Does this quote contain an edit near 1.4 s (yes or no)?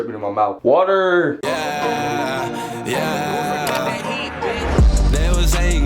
yes